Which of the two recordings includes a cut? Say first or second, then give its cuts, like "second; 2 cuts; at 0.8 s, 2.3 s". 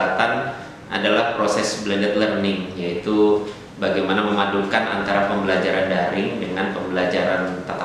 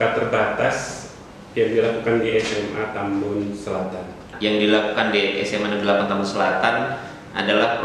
second; 1 cut; at 4.3 s